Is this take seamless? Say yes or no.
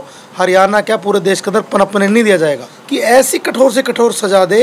no